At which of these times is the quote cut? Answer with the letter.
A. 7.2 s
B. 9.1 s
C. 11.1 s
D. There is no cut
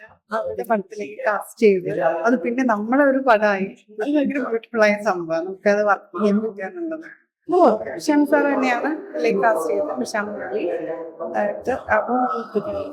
D